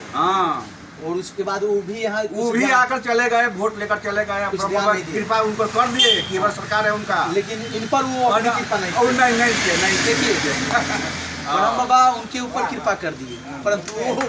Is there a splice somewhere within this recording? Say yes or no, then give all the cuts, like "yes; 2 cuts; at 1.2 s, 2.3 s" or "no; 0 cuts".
no; 0 cuts